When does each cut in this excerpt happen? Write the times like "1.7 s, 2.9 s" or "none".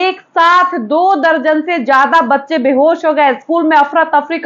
none